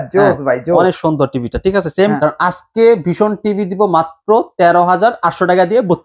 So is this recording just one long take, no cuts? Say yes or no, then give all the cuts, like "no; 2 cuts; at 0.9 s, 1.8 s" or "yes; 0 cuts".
no; 1 cut; at 2.2 s